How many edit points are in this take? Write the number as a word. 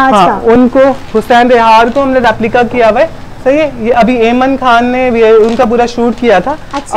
zero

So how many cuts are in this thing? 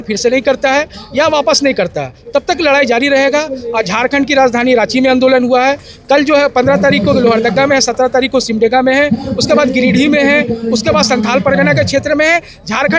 zero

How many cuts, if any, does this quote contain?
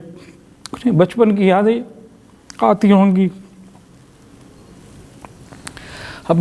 zero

